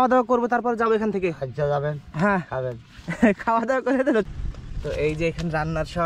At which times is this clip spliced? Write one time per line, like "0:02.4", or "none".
0:04.3

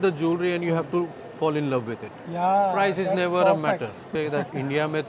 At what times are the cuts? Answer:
0:04.1

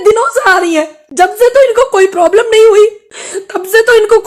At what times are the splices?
none

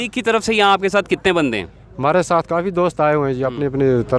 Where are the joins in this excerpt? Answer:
none

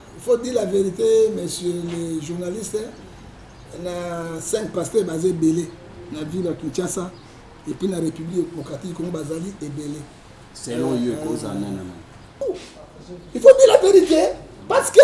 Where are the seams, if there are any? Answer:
0:12.4

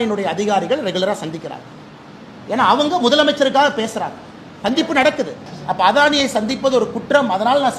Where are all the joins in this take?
0:05.5

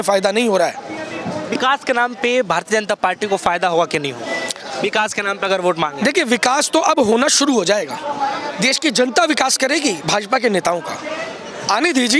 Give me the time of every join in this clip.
none

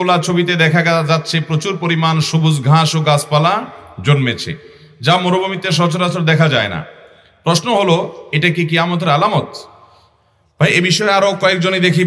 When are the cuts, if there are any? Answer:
none

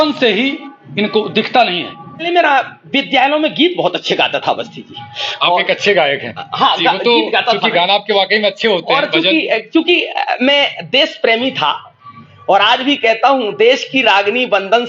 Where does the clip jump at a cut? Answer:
0:02.3

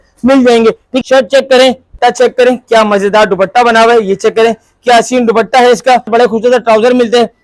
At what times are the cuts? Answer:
0:01.0
0:01.9
0:06.1

